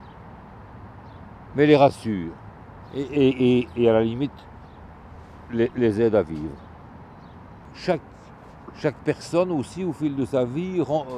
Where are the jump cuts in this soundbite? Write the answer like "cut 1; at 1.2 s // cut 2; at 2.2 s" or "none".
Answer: none